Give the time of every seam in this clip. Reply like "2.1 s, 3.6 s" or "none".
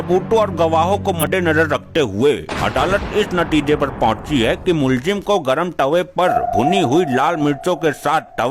1.2 s